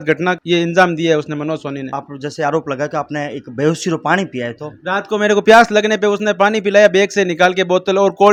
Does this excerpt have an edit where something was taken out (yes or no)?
no